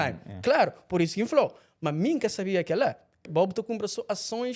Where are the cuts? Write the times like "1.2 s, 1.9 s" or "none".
3.2 s